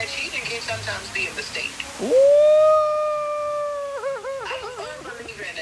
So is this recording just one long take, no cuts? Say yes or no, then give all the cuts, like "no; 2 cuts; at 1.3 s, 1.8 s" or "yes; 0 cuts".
yes; 0 cuts